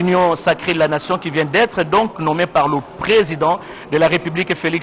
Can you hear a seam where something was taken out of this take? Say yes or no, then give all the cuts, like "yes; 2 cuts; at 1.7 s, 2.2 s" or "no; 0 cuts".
no; 0 cuts